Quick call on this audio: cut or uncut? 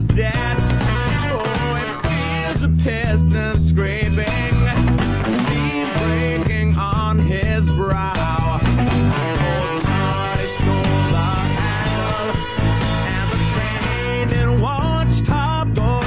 uncut